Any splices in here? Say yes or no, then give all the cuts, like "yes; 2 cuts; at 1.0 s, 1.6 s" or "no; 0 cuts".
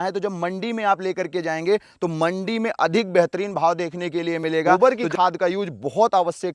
yes; 1 cut; at 4.8 s